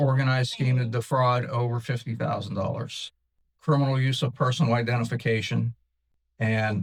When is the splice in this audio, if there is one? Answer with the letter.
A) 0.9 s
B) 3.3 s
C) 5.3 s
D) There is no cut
D